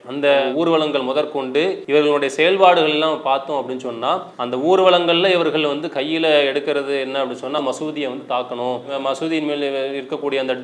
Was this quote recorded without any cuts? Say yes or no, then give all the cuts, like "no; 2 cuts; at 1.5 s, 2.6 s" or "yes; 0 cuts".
no; 2 cuts; at 1.8 s, 7.6 s